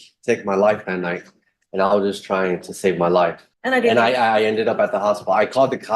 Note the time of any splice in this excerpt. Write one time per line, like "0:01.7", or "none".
0:03.5

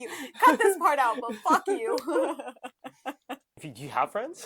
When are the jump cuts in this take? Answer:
0:03.6

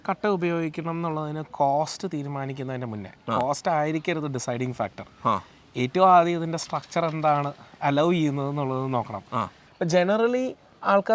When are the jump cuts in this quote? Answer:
0:09.6

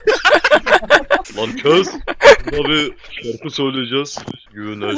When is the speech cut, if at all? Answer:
0:01.3

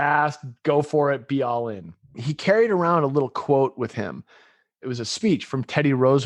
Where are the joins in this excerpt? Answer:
0:02.2
0:04.8

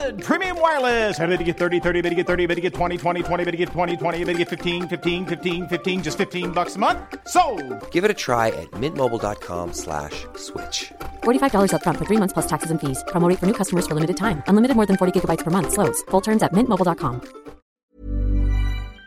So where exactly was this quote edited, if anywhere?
0:17.8

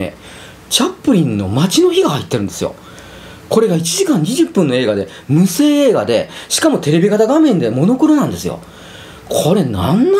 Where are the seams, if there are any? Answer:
none

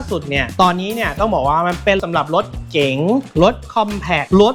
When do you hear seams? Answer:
none

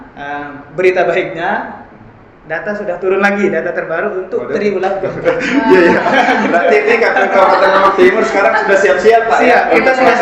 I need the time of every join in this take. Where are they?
none

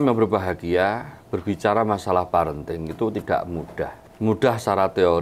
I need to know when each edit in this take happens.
0:04.0

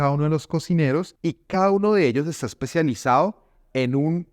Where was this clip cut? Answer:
0:01.1

